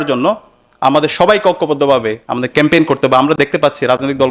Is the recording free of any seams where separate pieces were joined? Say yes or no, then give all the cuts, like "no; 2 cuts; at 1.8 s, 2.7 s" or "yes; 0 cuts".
yes; 0 cuts